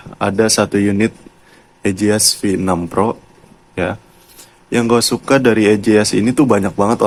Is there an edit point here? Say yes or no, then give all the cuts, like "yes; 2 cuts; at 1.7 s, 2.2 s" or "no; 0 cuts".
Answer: no; 0 cuts